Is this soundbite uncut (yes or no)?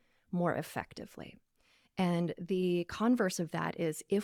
yes